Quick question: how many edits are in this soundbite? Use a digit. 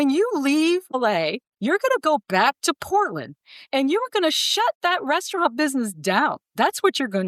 2